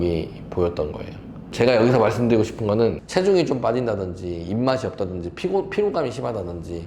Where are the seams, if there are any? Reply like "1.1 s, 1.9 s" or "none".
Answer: 3.0 s